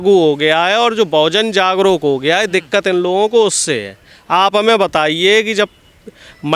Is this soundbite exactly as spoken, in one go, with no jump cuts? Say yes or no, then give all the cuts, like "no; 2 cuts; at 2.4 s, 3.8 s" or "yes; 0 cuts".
yes; 0 cuts